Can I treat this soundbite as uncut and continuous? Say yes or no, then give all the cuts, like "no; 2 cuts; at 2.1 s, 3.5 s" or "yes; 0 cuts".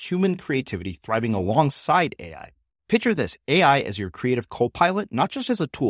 yes; 0 cuts